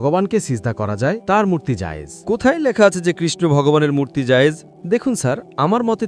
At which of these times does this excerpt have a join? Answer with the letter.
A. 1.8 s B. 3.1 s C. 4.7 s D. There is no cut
C